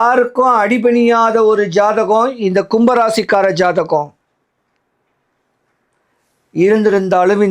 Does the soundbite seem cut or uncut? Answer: uncut